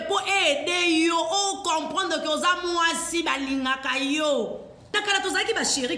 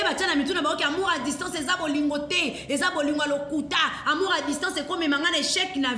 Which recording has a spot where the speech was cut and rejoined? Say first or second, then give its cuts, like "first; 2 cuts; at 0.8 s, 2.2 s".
first; 1 cut; at 5.0 s